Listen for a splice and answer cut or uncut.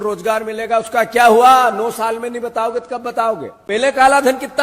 cut